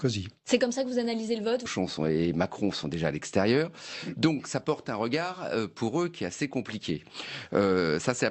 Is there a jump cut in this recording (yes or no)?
no